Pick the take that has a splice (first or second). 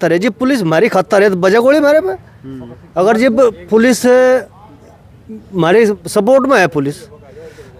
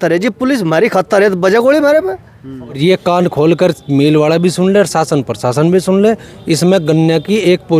second